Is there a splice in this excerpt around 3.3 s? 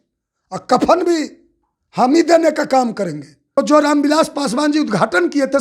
yes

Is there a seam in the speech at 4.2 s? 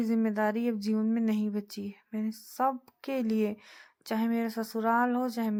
no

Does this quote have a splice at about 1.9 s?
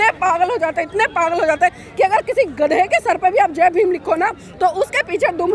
no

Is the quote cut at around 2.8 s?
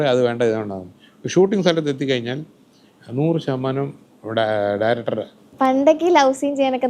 no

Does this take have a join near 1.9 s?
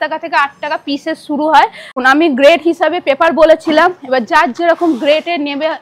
yes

